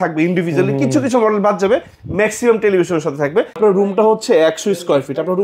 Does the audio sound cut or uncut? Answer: cut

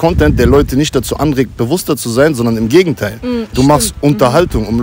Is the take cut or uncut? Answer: uncut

